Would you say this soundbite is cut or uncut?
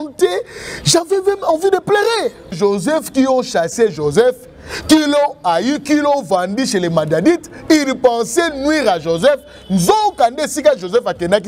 cut